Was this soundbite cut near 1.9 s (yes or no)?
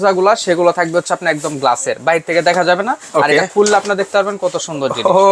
no